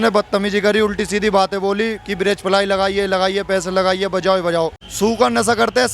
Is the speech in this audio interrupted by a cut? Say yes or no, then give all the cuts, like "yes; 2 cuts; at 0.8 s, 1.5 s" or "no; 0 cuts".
yes; 1 cut; at 4.8 s